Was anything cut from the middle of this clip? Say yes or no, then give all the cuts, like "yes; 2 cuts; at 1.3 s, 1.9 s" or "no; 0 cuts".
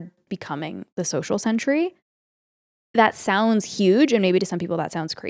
no; 0 cuts